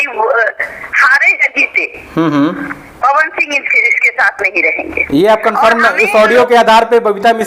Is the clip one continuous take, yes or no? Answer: yes